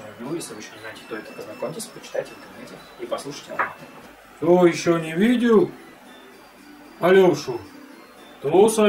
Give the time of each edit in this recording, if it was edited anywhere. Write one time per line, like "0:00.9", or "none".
0:04.2